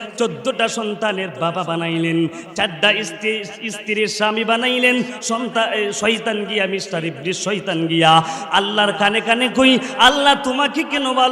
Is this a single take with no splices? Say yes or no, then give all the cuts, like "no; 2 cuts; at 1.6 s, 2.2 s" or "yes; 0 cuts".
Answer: yes; 0 cuts